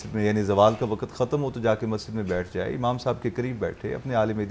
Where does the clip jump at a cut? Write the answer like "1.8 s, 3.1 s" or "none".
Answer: none